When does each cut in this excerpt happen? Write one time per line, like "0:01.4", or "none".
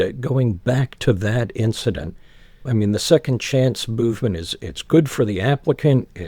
0:02.6